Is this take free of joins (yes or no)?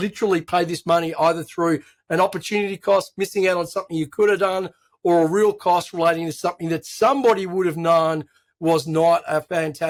yes